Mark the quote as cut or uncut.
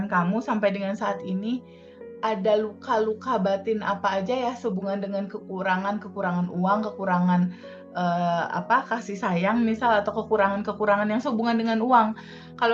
uncut